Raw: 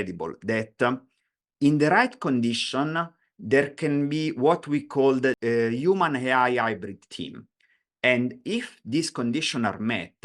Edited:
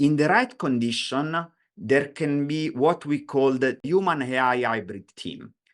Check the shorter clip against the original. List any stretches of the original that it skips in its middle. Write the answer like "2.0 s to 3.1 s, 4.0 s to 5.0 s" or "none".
5.4 s to 5.7 s